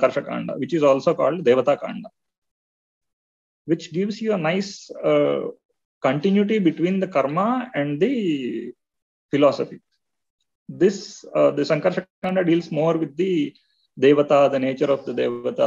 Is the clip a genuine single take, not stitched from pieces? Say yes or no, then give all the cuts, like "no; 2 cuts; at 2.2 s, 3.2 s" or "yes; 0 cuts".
yes; 0 cuts